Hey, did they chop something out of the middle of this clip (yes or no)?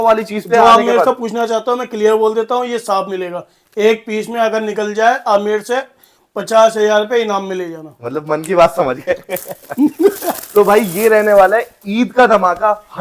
no